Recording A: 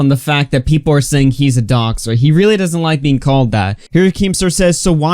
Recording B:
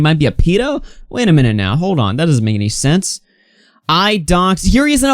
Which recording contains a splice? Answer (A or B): A